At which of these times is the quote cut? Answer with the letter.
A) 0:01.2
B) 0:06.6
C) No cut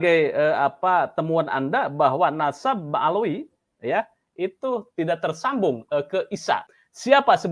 B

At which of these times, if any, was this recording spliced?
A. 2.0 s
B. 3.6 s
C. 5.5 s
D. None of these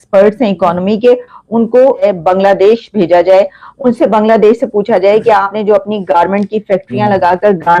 A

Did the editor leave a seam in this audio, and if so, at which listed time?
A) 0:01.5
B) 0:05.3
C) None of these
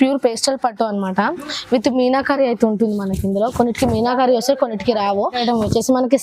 B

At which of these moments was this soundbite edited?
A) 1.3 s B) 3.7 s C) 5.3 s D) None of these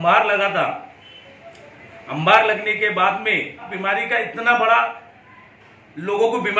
B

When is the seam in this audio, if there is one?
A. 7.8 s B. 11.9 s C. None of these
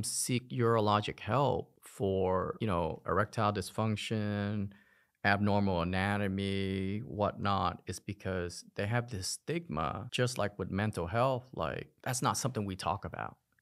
B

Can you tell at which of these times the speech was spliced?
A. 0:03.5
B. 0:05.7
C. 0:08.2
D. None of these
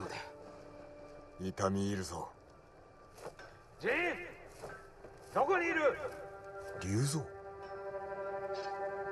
D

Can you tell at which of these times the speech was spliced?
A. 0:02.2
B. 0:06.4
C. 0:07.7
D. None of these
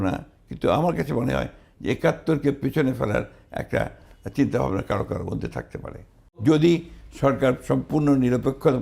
B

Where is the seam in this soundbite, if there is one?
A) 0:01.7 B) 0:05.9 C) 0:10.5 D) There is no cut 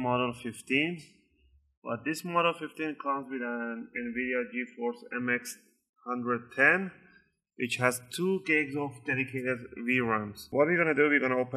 C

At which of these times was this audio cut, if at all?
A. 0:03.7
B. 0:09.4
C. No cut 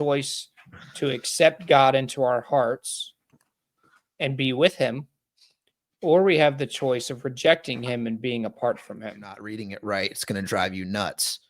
B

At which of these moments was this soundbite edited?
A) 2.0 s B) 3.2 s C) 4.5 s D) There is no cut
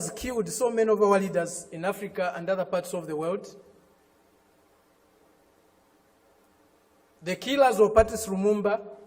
D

